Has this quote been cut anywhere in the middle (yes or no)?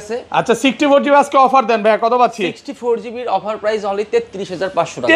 no